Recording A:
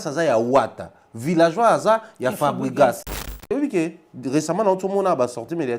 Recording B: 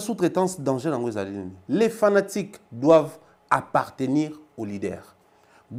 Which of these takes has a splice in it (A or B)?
A